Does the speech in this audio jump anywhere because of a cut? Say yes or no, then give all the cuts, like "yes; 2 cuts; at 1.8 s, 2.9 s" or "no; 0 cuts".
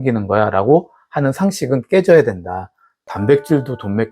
no; 0 cuts